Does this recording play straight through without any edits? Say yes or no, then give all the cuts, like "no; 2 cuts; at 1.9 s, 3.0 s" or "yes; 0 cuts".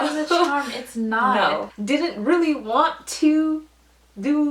no; 1 cut; at 1.7 s